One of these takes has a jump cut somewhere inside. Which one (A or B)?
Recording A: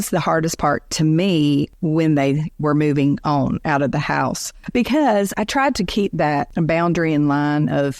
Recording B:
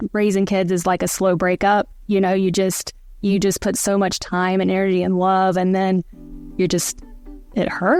A